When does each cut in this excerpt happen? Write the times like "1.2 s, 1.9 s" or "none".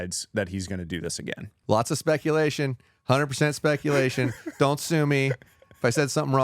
1.6 s